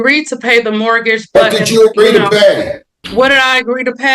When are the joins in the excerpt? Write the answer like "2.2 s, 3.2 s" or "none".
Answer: 2.9 s